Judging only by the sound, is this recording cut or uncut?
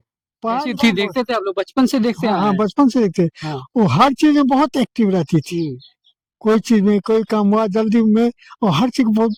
uncut